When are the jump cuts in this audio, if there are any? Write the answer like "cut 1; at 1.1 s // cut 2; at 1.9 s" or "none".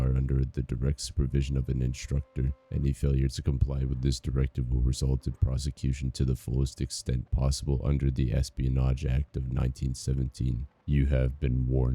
cut 1; at 10.7 s